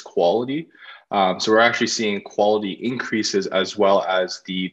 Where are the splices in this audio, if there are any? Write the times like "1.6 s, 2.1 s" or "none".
none